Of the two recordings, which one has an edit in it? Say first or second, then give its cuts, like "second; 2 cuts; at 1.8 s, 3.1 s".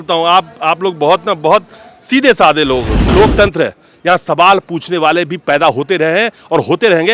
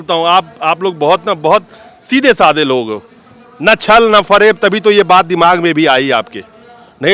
first; 1 cut; at 3.1 s